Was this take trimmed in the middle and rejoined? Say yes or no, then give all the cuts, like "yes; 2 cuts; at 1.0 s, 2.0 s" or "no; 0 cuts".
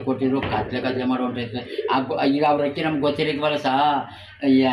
no; 0 cuts